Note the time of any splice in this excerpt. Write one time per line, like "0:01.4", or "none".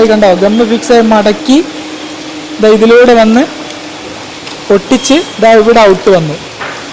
none